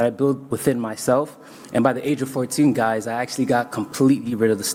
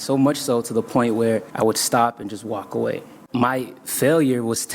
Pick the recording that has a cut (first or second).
second